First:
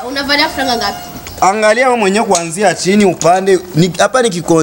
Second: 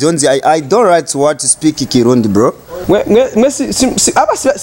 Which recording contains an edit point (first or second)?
second